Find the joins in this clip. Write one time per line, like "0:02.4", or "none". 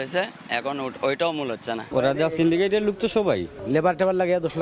0:01.8